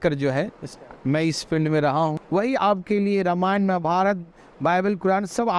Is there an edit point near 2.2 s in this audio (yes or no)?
yes